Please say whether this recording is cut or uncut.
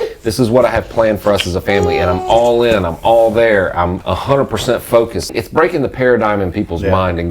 cut